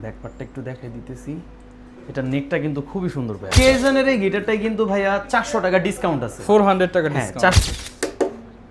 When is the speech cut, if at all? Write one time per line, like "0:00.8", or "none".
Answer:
0:03.4
0:07.6